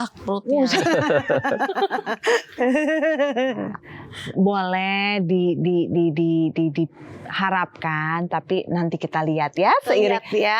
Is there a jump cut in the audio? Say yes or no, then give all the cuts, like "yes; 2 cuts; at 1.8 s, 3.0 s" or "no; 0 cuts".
no; 0 cuts